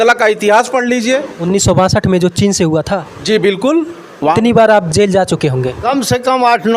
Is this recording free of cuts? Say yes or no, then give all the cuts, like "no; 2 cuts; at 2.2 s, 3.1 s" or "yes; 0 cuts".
no; 1 cut; at 4.3 s